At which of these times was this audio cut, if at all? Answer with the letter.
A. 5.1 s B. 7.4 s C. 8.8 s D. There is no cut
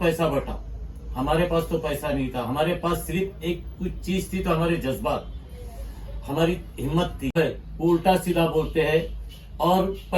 B